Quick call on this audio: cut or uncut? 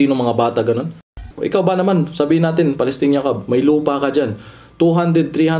cut